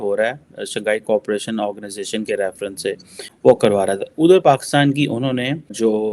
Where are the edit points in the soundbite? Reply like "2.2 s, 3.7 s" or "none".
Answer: 3.3 s